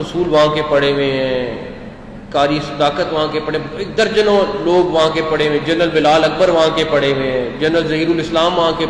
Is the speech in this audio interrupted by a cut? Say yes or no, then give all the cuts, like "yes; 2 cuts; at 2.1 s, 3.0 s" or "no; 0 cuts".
no; 0 cuts